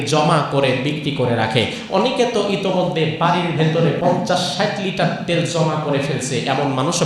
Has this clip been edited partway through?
yes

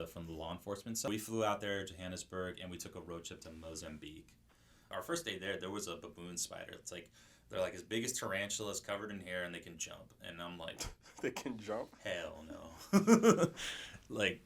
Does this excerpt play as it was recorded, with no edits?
no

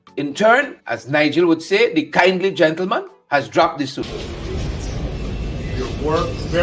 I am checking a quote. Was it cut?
yes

